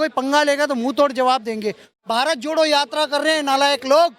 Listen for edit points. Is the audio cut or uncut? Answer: cut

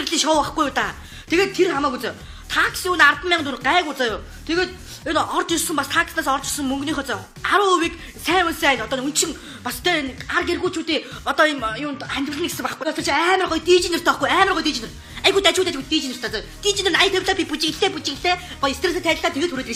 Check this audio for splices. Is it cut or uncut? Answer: uncut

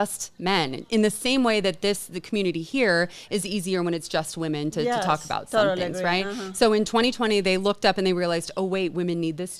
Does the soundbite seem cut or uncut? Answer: uncut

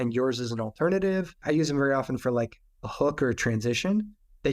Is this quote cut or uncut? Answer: cut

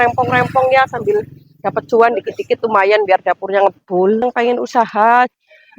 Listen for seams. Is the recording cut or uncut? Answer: cut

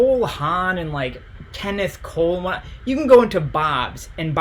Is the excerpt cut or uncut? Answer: uncut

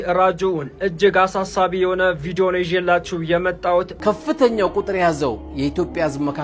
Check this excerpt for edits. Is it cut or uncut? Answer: cut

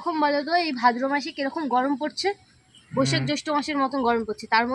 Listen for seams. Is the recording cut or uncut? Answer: uncut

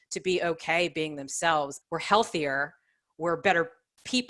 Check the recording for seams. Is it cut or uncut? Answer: cut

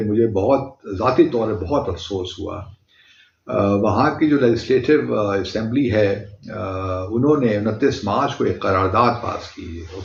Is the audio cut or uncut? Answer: uncut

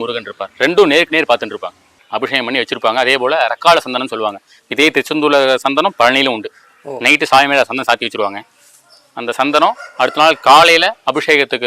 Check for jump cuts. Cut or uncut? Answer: cut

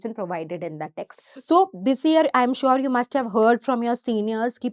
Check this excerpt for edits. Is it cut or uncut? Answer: cut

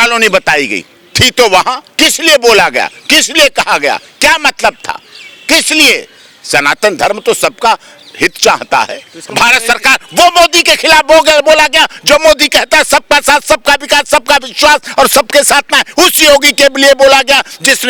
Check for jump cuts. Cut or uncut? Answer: uncut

